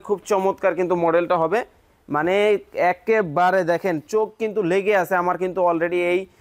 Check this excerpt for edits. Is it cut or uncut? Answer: uncut